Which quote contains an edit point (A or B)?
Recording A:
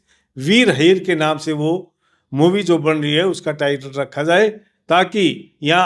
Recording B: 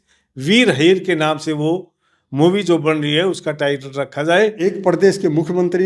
B